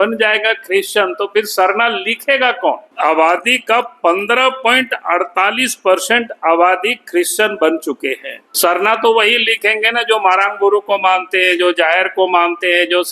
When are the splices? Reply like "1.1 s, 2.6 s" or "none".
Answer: 2.9 s, 8.5 s